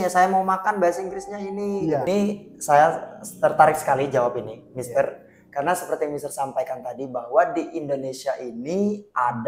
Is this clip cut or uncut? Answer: cut